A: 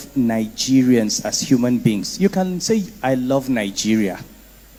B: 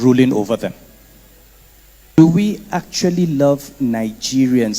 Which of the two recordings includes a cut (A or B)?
B